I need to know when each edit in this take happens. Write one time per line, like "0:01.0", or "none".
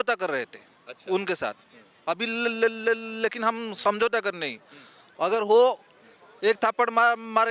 none